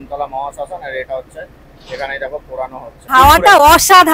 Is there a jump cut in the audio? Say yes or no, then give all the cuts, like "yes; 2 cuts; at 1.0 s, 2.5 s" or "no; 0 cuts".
yes; 1 cut; at 2.9 s